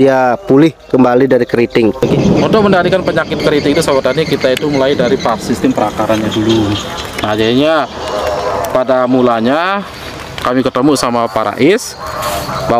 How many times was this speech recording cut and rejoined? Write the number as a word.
one